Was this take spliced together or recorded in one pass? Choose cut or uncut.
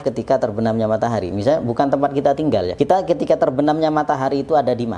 cut